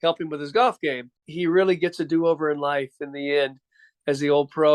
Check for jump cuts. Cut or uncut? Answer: cut